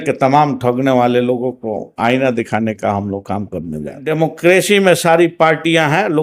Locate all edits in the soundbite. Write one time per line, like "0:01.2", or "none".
0:04.1